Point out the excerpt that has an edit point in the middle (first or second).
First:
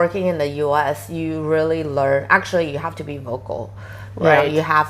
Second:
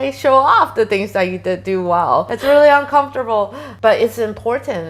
second